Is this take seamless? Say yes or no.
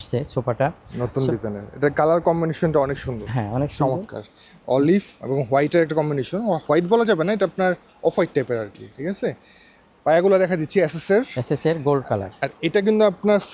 yes